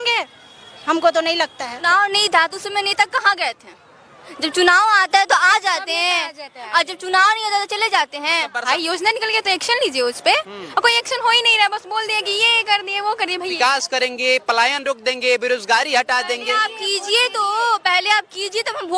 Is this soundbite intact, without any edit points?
no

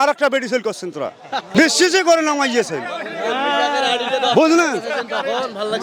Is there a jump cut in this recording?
no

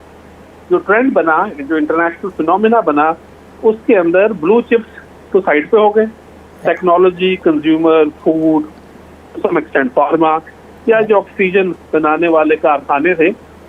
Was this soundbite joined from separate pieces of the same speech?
no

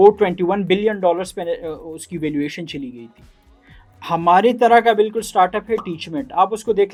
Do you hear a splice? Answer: no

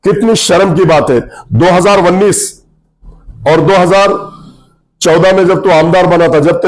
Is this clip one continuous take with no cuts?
yes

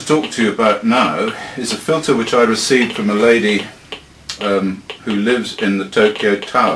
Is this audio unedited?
yes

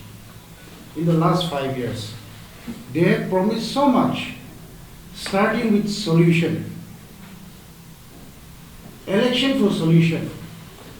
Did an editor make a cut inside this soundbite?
no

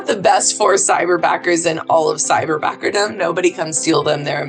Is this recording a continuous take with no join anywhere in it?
yes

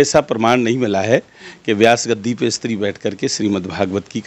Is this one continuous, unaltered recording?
yes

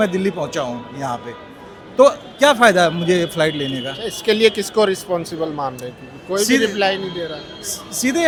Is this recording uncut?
yes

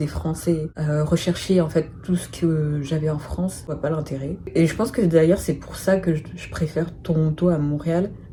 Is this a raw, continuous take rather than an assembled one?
yes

